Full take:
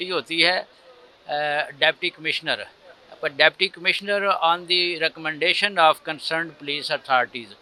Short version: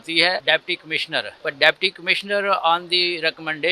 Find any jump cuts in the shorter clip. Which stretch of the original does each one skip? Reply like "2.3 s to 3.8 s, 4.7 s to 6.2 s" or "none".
1.1 s to 2.7 s